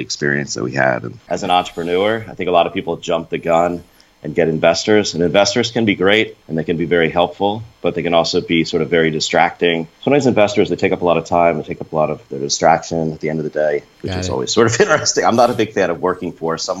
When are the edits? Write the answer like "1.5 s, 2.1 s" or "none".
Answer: 1.1 s, 6.4 s, 9.9 s, 14.0 s